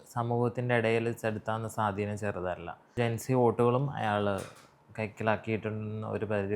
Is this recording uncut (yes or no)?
no